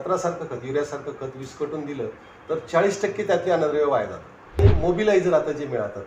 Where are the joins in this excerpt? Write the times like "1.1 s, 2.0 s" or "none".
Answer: 4.6 s

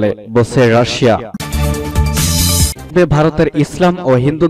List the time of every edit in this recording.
1.4 s

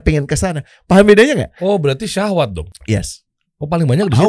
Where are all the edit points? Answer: 2.7 s

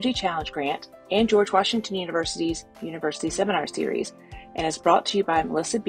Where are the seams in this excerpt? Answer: none

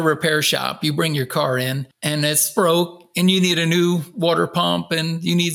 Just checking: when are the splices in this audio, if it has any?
2.5 s

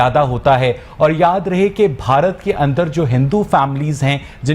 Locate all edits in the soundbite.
none

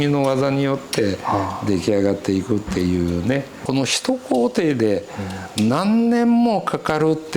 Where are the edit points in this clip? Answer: 3.5 s

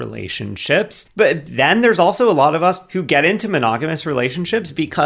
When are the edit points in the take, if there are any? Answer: 1.1 s

